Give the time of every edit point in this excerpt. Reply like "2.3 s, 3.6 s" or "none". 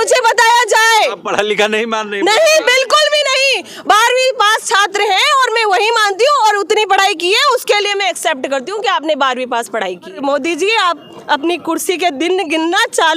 10.2 s